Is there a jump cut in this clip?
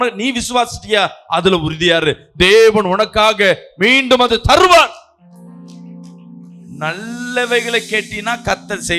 no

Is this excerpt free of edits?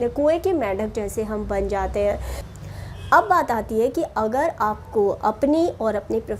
no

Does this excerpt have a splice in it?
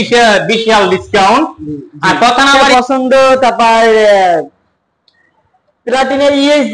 yes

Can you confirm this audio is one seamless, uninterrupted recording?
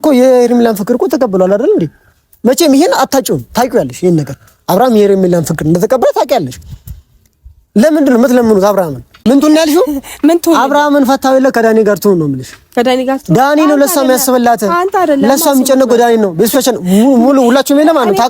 no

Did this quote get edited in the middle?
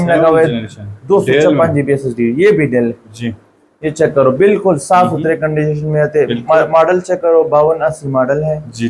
no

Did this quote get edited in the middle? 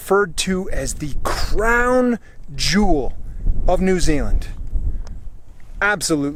no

